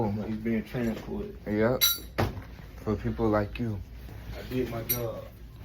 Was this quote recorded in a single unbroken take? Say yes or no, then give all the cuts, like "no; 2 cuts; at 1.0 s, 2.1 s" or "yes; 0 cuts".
no; 1 cut; at 4.3 s